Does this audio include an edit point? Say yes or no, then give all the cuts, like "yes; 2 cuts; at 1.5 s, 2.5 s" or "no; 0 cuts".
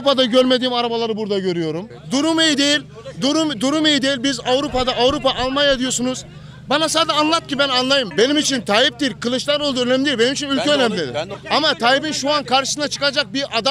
yes; 3 cuts; at 1.9 s, 8.1 s, 11.3 s